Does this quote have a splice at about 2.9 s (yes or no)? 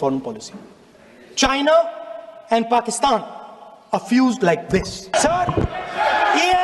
no